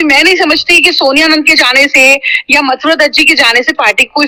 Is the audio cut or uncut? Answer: uncut